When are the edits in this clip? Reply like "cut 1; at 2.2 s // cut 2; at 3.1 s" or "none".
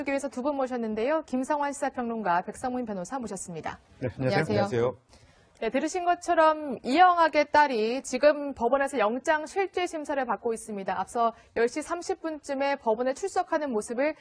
none